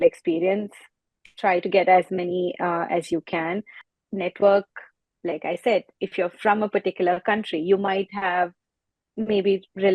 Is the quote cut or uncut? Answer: cut